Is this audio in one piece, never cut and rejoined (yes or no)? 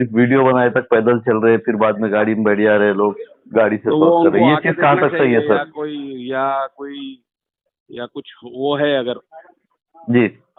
yes